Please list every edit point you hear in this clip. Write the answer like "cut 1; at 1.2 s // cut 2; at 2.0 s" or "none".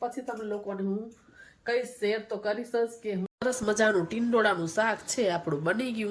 cut 1; at 3.3 s